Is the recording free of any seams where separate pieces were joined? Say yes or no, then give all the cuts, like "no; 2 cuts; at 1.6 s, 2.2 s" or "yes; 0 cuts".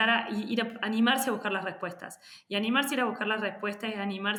yes; 0 cuts